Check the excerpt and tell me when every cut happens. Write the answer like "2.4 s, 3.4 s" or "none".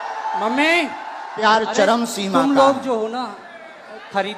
1.4 s